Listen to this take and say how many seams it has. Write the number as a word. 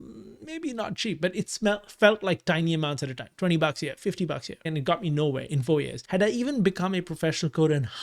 two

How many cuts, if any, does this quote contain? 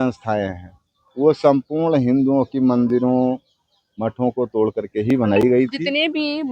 zero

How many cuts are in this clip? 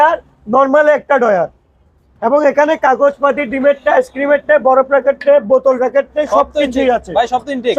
zero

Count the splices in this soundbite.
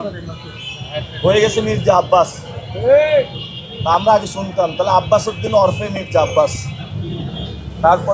zero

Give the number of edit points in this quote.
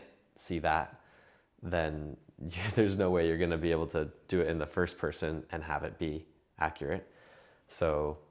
zero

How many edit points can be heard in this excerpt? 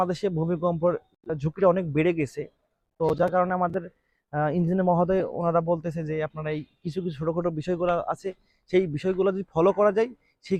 zero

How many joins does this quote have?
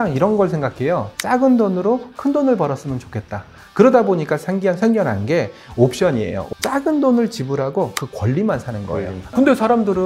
three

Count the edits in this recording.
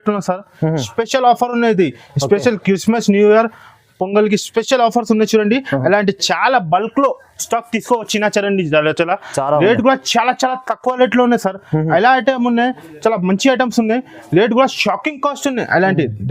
zero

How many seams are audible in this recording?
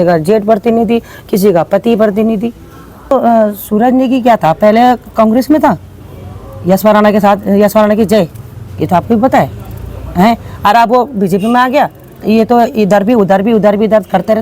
one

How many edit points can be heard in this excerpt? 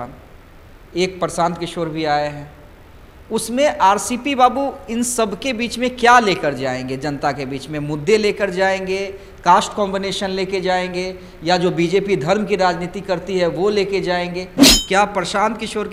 one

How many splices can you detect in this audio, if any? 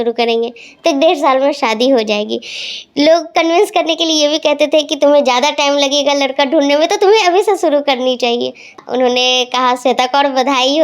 one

